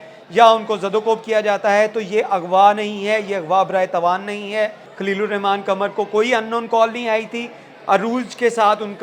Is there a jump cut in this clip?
yes; 1 cut; at 4.9 s

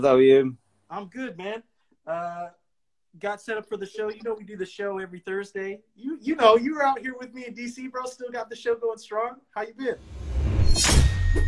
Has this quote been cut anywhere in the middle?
yes; 1 cut; at 10.5 s

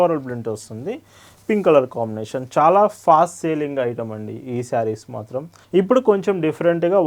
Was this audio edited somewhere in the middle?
yes; 1 cut; at 5.5 s

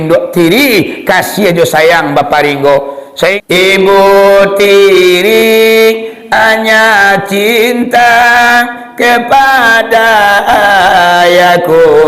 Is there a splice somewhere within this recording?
yes; 1 cut; at 3.4 s

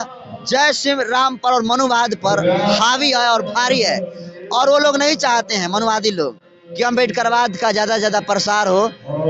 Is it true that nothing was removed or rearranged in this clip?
yes; 0 cuts

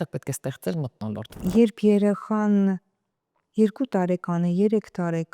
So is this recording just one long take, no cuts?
no; 1 cut; at 1.3 s

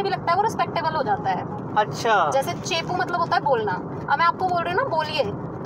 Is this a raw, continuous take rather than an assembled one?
yes; 0 cuts

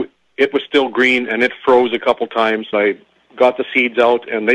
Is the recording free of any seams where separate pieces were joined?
no; 1 cut; at 2.7 s

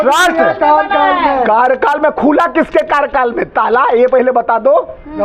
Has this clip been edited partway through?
no; 0 cuts

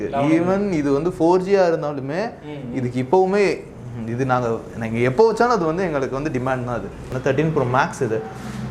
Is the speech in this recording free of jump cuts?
no; 1 cut; at 7.1 s

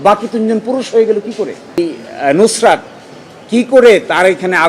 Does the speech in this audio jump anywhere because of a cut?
yes; 1 cut; at 1.8 s

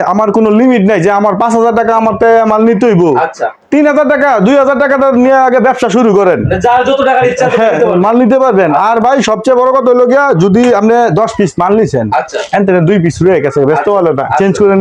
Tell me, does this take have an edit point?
no; 0 cuts

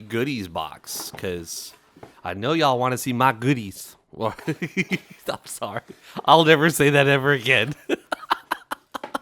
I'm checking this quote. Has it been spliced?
no; 0 cuts

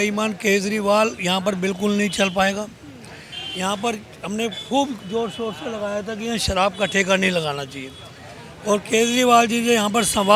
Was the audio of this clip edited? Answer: no; 0 cuts

